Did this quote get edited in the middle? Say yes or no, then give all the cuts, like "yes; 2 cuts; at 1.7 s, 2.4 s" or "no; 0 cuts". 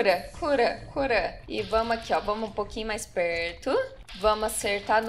yes; 2 cuts; at 1.4 s, 4.0 s